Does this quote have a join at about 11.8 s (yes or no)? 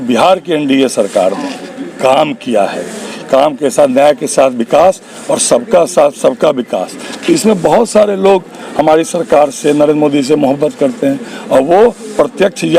no